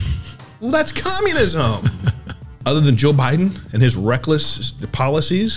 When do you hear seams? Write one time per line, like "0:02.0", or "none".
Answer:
0:02.6